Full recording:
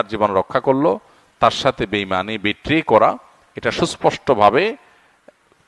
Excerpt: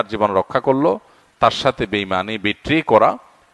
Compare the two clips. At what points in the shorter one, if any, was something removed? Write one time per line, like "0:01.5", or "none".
none